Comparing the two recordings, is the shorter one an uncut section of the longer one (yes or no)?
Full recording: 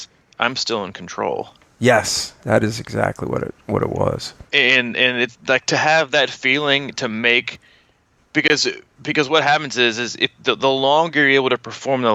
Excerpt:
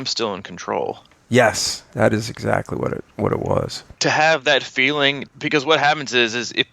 no